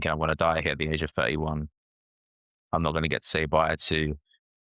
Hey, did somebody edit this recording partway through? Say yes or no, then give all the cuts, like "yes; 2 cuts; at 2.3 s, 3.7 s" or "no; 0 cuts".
no; 0 cuts